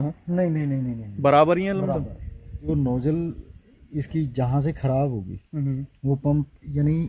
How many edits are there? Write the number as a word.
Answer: one